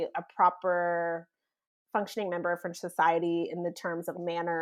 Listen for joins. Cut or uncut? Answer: uncut